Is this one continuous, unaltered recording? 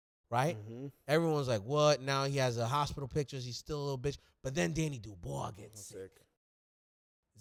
yes; 0 cuts

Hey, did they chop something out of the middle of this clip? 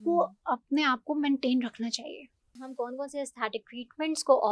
yes; 1 cut; at 2.6 s

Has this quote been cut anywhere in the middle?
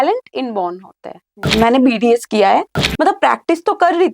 yes; 2 cuts; at 1.5 s, 2.8 s

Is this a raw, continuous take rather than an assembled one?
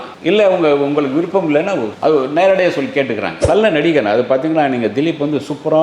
no; 1 cut; at 3.5 s

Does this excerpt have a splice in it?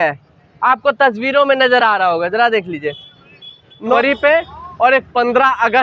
yes; 1 cut; at 3.9 s

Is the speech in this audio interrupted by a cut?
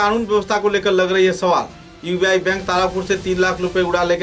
no; 0 cuts

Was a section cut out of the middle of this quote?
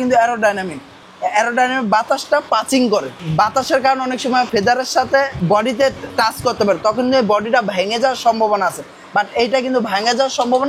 yes; 3 cuts; at 3.2 s, 4.5 s, 5.3 s

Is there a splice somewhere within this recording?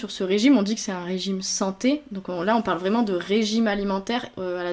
no; 0 cuts

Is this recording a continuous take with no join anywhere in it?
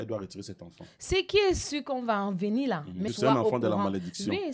no; 1 cut; at 3.1 s

